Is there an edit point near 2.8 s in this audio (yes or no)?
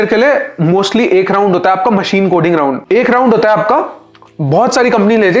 yes